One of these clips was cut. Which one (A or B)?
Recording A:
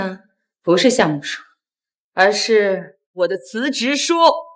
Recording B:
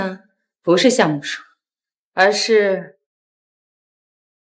A